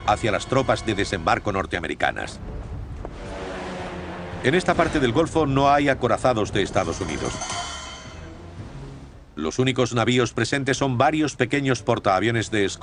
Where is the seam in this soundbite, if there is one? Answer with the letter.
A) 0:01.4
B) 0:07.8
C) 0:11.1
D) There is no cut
C